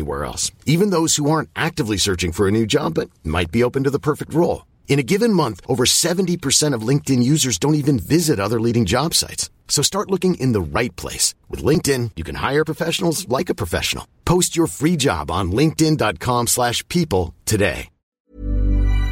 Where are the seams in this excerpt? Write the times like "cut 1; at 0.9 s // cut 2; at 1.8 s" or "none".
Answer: cut 1; at 18.2 s